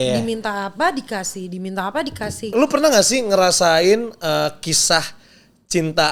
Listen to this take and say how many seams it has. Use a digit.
1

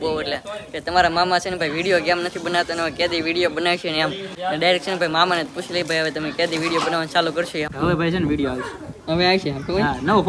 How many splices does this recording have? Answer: 2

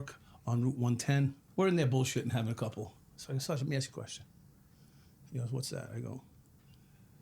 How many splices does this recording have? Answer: 2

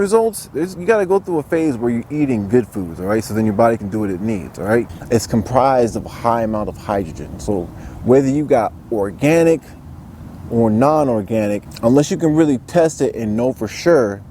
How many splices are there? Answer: 1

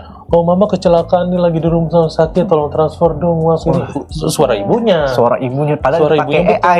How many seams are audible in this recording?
0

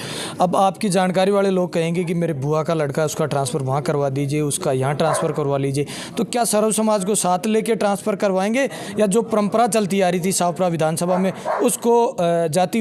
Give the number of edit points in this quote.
0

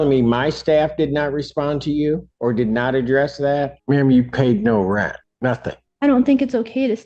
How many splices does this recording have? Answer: 3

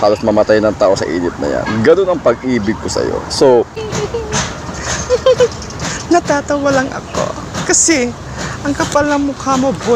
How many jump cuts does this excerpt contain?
1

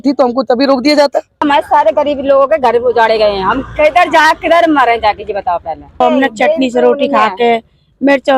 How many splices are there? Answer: 2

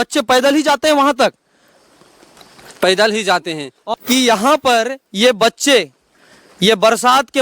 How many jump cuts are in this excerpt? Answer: 1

